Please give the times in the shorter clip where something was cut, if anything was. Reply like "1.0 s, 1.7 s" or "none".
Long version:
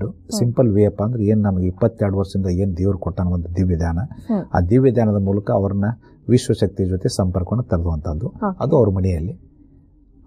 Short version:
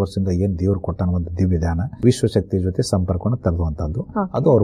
1.8 s